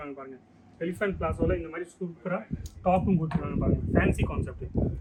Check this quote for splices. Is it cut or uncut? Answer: uncut